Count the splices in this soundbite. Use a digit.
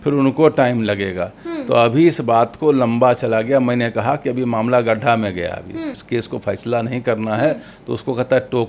1